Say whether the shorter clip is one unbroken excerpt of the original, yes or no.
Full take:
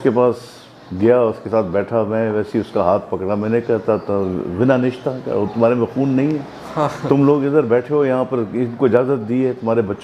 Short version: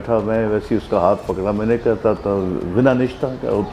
yes